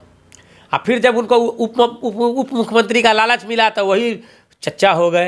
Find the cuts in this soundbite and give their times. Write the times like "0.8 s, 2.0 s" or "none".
none